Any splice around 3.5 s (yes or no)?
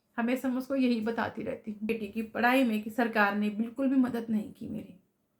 no